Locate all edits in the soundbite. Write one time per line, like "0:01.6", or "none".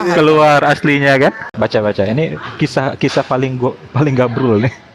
0:01.4